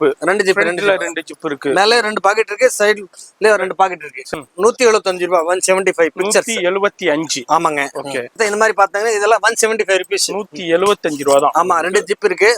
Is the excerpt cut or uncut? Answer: cut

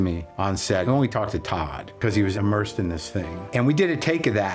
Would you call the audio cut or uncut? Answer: uncut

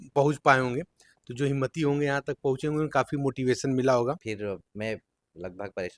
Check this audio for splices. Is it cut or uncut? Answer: cut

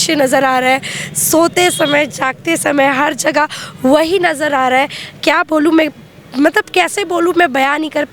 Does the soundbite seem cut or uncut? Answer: uncut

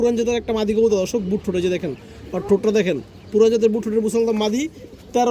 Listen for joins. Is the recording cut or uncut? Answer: uncut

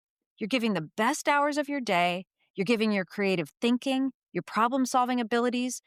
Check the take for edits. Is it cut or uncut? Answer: uncut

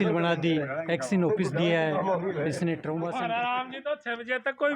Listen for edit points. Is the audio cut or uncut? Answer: cut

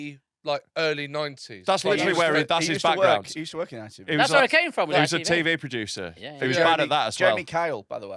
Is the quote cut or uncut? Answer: uncut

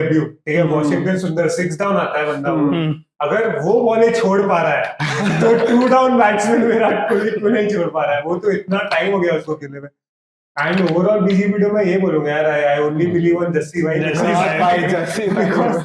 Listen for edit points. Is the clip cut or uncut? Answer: uncut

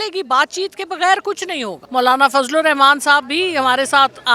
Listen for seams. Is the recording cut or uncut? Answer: cut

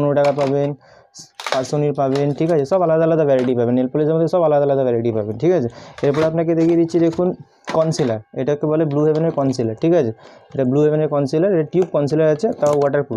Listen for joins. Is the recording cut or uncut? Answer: uncut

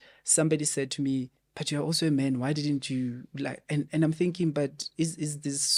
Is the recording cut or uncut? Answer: uncut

